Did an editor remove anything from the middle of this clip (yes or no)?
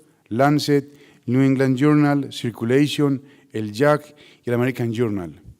no